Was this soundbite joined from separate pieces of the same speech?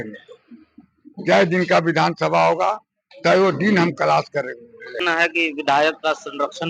yes; 1 cut; at 5.0 s

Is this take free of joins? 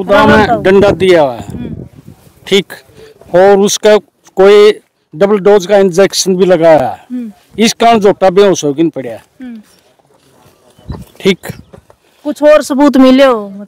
yes; 0 cuts

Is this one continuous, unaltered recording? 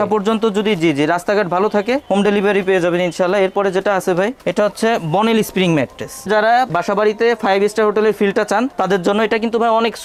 yes; 0 cuts

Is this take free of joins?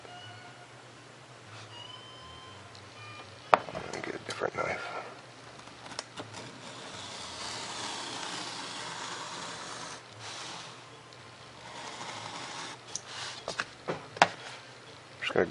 yes; 0 cuts

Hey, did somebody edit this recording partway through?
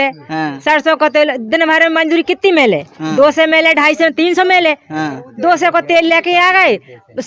no; 0 cuts

